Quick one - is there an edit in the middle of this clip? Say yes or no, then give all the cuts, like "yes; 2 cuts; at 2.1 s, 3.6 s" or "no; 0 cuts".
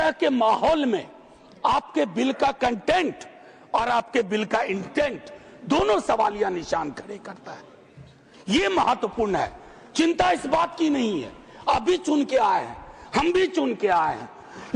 no; 0 cuts